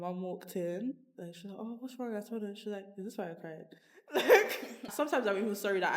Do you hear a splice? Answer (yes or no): yes